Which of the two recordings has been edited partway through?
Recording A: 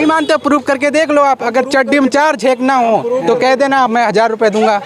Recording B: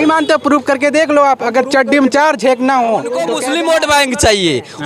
B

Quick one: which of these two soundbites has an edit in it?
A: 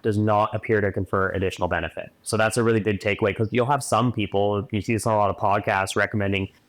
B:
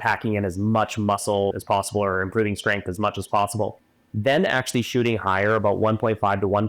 B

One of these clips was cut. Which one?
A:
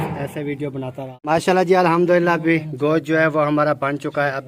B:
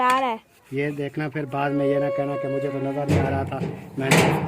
A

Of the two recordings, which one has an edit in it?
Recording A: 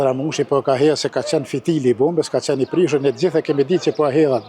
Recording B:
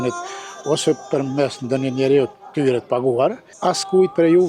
B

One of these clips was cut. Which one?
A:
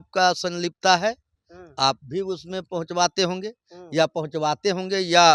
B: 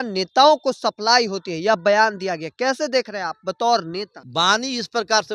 B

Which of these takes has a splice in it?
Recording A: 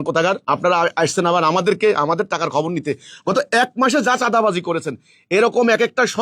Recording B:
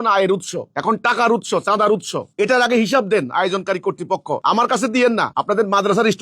B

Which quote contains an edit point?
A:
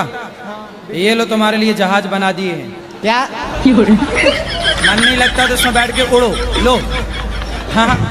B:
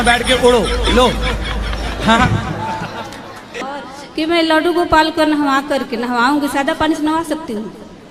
B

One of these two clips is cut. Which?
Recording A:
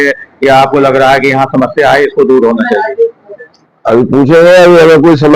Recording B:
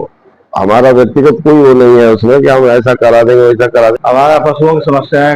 B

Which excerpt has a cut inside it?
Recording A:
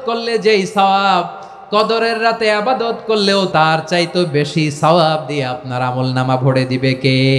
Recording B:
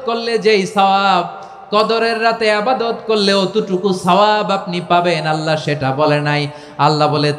A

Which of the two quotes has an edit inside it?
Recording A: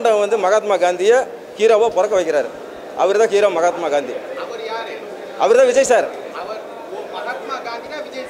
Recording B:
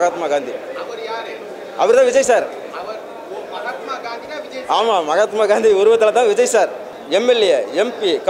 B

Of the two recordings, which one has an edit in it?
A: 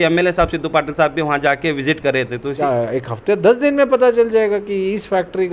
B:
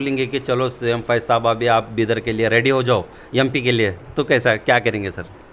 A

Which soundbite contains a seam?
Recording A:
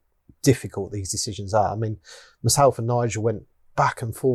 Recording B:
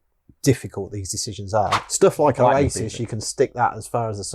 B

